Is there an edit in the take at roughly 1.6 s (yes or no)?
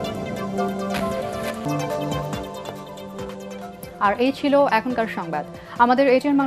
no